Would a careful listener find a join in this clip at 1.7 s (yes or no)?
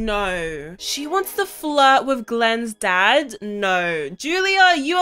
no